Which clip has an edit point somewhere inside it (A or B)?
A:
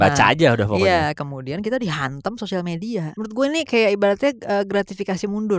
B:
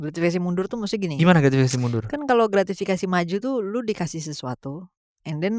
A